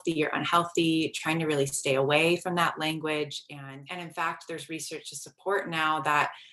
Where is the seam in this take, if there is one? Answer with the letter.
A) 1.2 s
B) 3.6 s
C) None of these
B